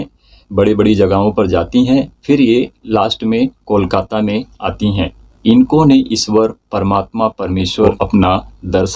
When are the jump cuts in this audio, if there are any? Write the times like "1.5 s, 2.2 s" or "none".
5.2 s, 7.9 s